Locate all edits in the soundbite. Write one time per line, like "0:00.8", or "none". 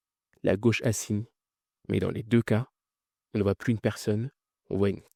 none